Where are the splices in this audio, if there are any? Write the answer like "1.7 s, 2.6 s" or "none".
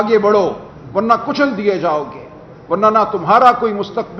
none